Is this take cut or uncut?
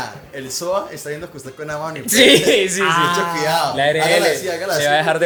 uncut